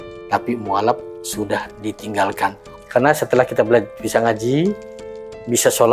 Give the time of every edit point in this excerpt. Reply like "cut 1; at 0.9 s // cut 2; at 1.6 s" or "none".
cut 1; at 2.8 s